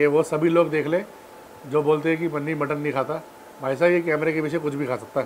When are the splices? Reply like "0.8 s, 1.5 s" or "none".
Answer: none